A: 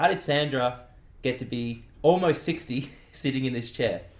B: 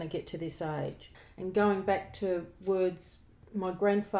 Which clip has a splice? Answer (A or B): B